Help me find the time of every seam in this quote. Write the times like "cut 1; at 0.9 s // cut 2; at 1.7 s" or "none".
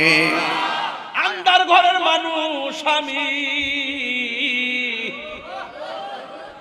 cut 1; at 1.1 s